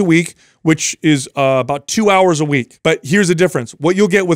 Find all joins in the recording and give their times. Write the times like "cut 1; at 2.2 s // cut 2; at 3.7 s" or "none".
cut 1; at 2.7 s

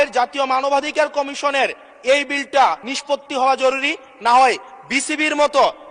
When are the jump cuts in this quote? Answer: cut 1; at 2.9 s

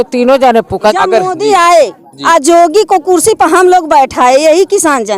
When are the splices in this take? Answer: cut 1; at 0.9 s

